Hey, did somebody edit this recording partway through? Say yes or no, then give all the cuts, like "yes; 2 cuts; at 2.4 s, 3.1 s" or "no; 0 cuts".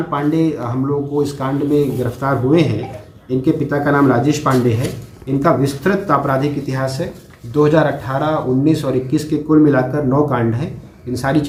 no; 0 cuts